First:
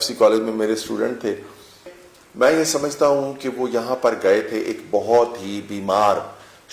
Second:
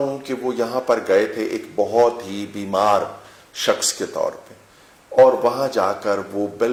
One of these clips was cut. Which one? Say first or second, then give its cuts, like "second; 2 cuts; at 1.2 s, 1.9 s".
first; 1 cut; at 2.0 s